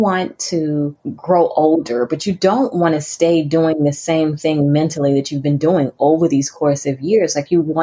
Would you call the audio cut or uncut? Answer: cut